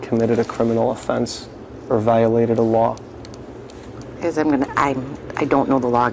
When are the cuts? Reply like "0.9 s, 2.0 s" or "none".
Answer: none